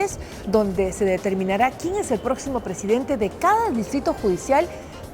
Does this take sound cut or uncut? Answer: cut